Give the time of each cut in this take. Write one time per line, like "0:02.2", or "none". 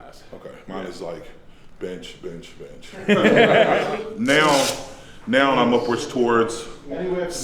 0:03.8